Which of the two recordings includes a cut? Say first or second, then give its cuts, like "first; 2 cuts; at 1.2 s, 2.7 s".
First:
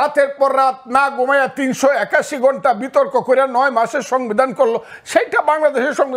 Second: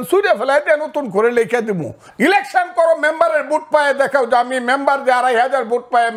second; 1 cut; at 2.0 s